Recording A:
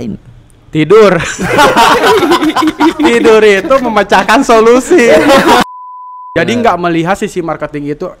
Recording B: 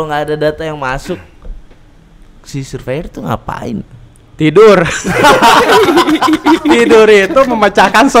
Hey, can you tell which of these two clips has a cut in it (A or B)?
A